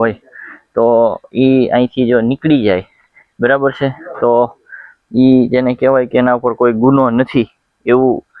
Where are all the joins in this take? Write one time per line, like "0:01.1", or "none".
none